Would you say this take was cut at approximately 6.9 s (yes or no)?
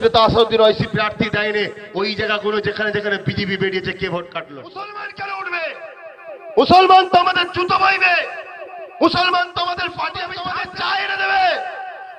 no